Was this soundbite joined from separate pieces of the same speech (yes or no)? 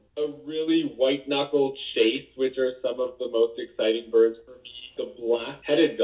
no